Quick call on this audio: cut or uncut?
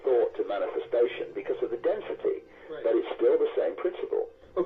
cut